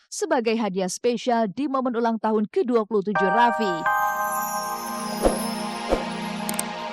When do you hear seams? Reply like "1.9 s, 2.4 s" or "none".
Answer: 3.7 s